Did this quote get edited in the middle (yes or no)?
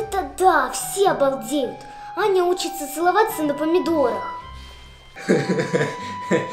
yes